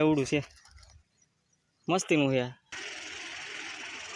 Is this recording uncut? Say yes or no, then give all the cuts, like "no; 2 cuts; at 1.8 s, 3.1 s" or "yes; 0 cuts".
no; 1 cut; at 2.7 s